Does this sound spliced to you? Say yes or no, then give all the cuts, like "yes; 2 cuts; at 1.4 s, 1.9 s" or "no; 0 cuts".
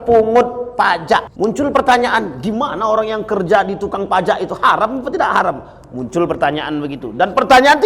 yes; 1 cut; at 1.3 s